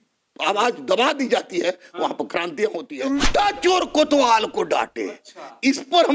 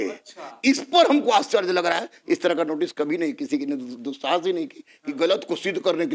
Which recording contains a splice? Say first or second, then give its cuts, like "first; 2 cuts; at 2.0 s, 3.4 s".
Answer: first; 1 cut; at 2.9 s